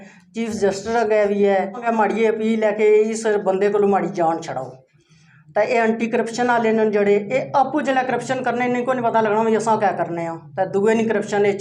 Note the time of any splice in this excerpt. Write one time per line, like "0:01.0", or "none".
0:01.8